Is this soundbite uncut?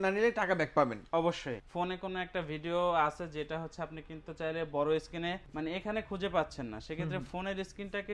no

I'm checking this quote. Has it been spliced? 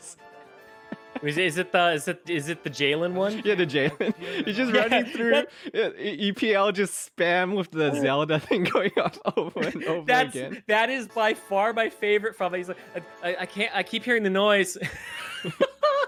no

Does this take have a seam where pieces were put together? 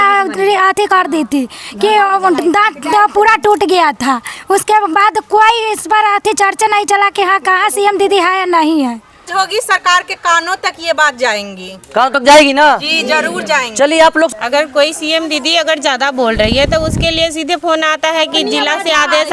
yes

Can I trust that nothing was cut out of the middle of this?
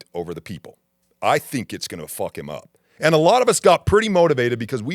no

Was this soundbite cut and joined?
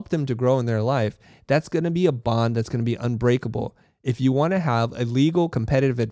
no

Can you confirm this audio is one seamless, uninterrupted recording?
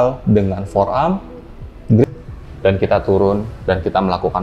no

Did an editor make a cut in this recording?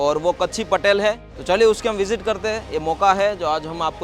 yes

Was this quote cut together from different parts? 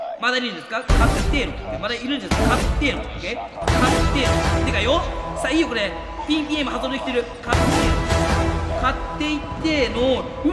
no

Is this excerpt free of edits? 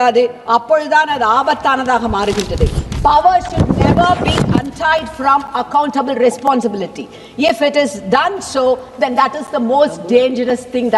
yes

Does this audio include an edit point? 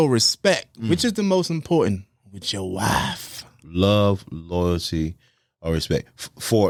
no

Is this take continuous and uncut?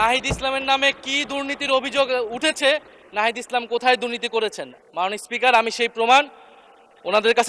yes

